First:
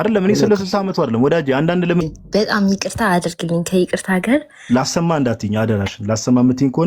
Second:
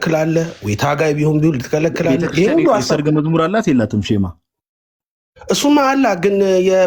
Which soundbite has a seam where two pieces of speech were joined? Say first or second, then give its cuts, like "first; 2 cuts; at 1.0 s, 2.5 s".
first; 1 cut; at 2.0 s